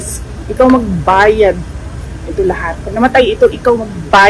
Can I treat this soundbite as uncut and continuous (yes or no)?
yes